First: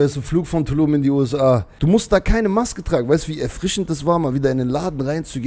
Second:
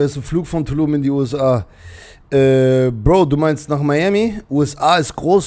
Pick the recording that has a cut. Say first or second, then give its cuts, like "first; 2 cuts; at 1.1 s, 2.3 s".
first; 1 cut; at 1.7 s